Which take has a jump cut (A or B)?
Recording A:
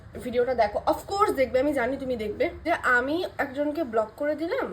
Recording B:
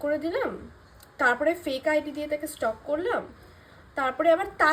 A